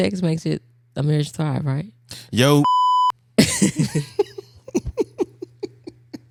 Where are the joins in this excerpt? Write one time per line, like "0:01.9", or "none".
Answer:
none